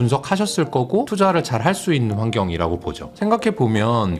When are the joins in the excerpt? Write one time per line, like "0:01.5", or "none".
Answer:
0:01.1